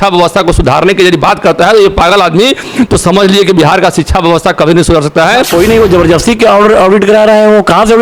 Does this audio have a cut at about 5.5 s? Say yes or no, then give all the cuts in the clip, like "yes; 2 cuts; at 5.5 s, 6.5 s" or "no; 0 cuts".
yes; 1 cut; at 5.5 s